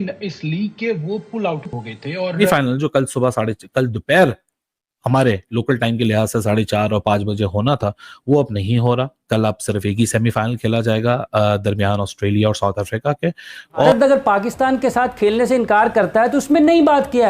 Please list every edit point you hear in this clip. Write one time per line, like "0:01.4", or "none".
0:02.3
0:13.9

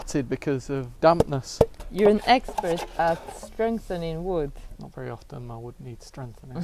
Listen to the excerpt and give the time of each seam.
0:00.9
0:01.8

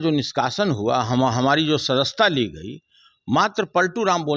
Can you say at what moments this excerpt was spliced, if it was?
none

